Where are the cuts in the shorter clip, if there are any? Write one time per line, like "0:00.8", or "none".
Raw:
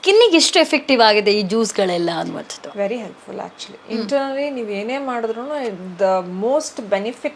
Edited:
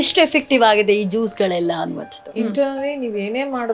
0:02.1